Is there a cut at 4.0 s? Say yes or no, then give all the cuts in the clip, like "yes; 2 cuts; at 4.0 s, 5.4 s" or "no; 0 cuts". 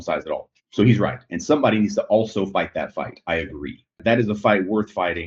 yes; 1 cut; at 4.0 s